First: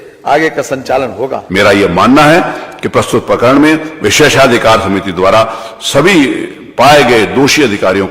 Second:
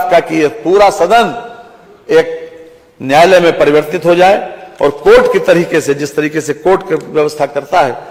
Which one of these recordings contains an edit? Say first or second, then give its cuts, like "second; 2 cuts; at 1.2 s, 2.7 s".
first; 1 cut; at 1.4 s